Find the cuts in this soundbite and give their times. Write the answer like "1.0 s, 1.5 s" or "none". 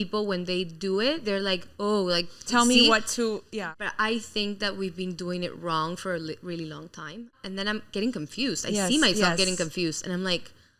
3.5 s, 7.4 s